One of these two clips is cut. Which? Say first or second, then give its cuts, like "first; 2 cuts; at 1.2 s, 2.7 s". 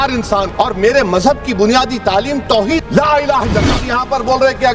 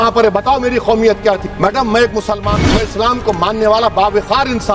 first; 1 cut; at 3.8 s